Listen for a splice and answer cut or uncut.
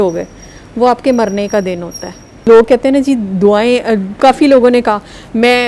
cut